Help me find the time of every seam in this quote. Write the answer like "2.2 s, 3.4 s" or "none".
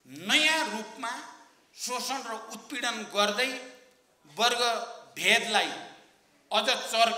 none